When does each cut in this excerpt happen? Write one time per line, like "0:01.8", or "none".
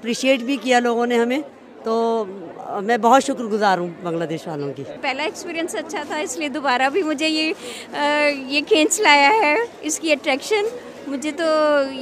none